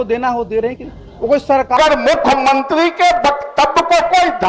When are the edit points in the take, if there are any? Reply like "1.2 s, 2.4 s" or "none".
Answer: 1.8 s